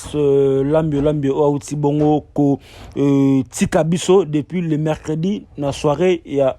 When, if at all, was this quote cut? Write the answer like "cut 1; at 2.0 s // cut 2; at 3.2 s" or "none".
none